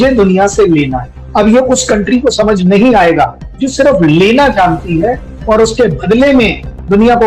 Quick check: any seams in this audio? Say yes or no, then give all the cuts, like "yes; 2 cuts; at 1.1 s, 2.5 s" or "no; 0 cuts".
yes; 1 cut; at 5.3 s